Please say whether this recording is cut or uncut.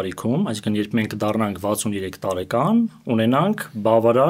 uncut